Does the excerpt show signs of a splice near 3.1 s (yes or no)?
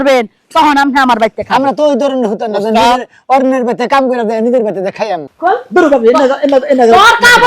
no